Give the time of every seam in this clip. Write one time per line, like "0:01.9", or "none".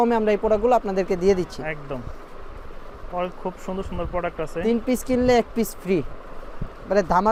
none